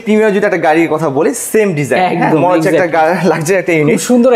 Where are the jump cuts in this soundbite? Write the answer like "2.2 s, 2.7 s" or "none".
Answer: none